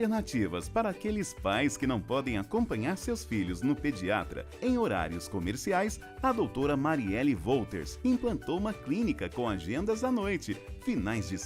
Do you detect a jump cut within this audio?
no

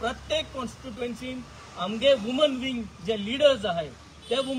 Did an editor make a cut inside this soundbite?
no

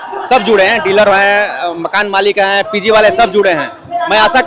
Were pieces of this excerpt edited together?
no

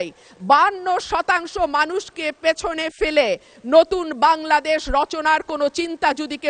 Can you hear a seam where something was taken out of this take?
no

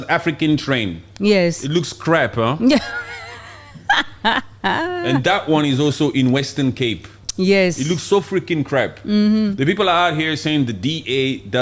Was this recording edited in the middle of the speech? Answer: no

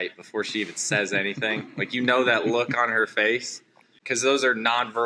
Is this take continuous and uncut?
no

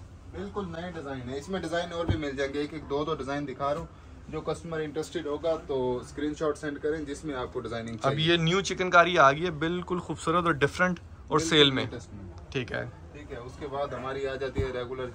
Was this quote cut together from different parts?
no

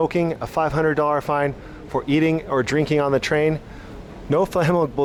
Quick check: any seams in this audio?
no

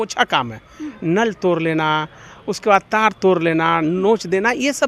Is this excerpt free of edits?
yes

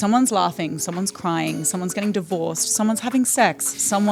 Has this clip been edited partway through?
no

